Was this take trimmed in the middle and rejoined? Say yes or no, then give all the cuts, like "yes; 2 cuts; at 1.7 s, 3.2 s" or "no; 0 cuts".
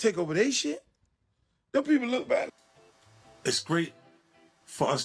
yes; 1 cut; at 2.6 s